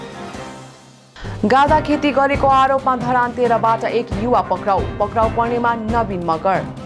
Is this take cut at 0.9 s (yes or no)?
yes